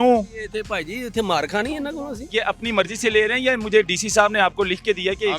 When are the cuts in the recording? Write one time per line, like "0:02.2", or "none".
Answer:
0:02.3